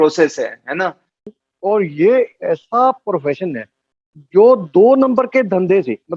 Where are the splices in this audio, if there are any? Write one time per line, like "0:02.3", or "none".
0:01.3